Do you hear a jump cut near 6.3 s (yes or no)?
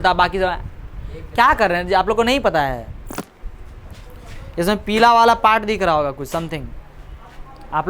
no